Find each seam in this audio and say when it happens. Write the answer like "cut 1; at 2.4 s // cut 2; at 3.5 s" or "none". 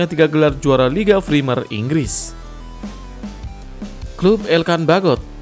none